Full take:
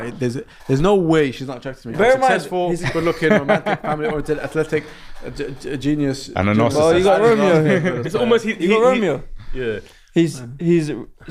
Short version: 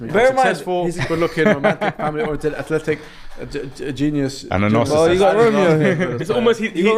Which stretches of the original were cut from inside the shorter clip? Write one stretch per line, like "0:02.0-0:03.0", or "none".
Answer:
none